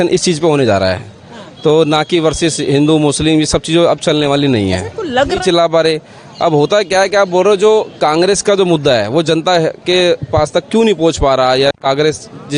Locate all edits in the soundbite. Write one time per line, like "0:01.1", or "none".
0:05.4